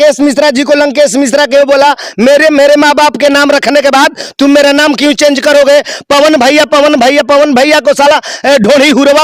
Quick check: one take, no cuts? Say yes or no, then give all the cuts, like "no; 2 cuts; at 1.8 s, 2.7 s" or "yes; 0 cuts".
yes; 0 cuts